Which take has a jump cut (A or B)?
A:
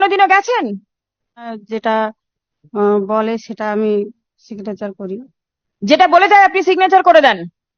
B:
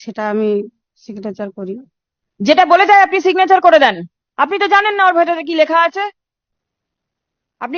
A